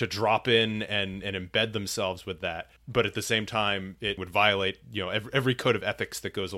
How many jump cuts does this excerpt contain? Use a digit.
2